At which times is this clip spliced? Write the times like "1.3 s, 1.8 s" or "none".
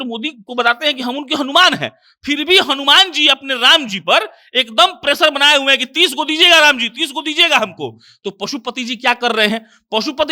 none